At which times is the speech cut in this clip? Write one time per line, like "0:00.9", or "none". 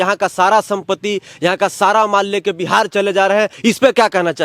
0:03.5